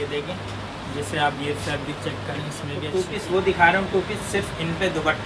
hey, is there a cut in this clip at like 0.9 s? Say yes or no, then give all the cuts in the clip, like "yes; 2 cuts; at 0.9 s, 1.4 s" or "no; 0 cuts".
no; 1 cut; at 2.8 s